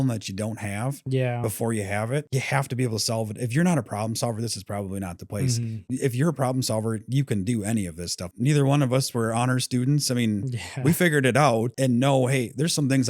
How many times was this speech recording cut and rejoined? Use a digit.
2